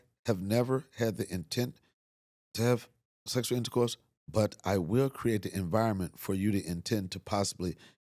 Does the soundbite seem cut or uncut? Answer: uncut